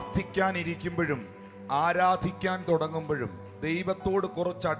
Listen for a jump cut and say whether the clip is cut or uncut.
uncut